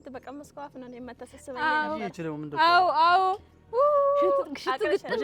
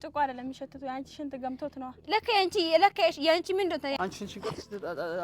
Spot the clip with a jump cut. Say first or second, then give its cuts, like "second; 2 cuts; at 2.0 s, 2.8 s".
second; 1 cut; at 3.9 s